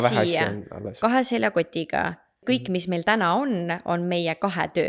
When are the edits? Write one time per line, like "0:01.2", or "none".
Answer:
0:02.3